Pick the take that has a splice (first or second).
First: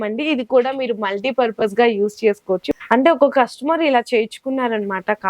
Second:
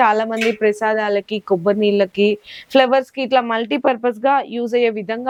first